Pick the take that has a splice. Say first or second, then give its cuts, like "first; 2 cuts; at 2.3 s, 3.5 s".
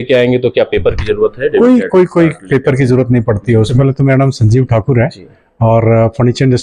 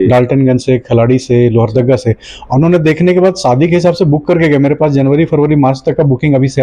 first; 1 cut; at 3.7 s